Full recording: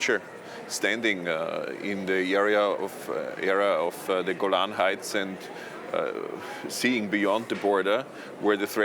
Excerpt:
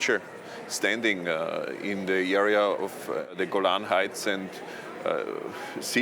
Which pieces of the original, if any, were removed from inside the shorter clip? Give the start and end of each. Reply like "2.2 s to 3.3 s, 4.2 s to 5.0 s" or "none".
3.3 s to 4.2 s